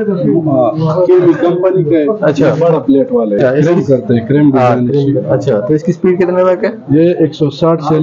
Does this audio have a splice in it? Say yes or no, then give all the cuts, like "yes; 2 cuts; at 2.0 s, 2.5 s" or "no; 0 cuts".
yes; 1 cut; at 3.4 s